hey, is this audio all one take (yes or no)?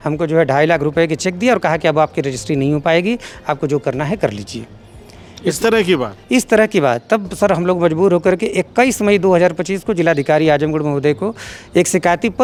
yes